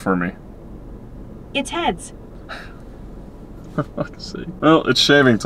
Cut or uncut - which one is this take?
cut